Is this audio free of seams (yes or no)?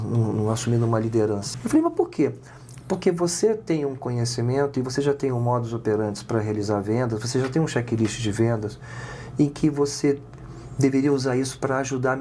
no